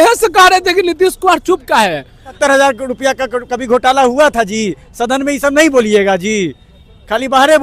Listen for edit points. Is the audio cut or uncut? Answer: cut